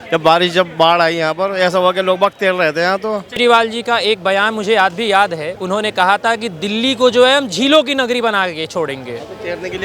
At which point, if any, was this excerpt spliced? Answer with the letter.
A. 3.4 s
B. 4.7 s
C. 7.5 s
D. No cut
A